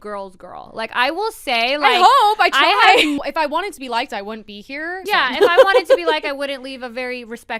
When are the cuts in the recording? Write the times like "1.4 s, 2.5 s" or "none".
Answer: 3.2 s, 5.0 s

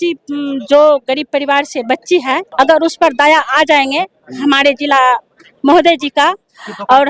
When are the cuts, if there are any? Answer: 2.5 s

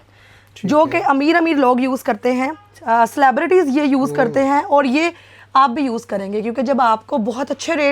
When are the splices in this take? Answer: none

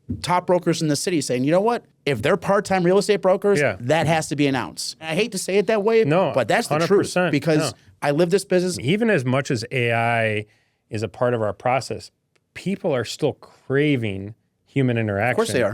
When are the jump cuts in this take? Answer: 1.9 s, 5.0 s, 8.8 s

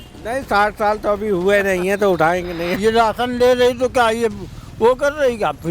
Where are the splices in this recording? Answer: 2.7 s

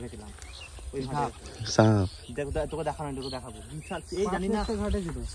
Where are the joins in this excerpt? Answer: none

